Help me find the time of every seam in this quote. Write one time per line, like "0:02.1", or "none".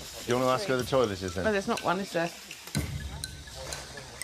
none